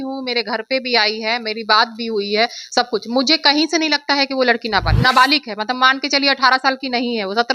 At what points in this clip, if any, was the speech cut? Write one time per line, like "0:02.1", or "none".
0:04.9